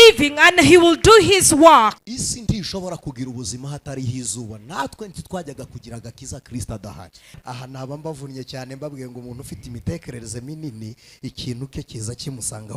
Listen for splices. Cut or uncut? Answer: cut